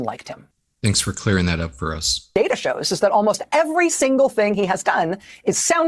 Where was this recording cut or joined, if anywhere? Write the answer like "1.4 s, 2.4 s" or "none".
2.3 s